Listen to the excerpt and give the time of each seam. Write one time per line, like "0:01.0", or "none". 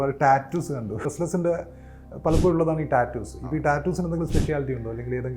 0:01.0